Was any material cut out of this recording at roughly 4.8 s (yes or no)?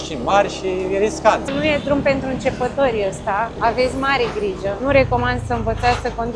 yes